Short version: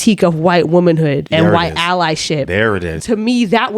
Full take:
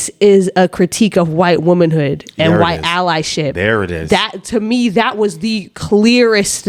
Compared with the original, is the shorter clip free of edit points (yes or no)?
no